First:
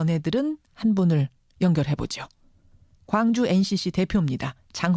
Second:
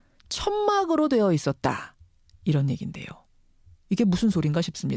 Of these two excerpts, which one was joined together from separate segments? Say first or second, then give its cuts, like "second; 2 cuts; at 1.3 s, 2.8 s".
first; 1 cut; at 1.9 s